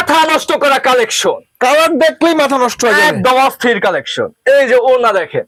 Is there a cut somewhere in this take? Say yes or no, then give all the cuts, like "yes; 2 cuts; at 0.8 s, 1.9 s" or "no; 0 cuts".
no; 0 cuts